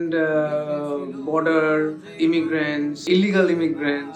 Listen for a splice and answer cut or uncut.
cut